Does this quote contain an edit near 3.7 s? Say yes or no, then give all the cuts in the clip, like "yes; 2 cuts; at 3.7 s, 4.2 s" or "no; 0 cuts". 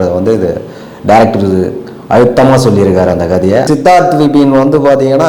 yes; 1 cut; at 3.7 s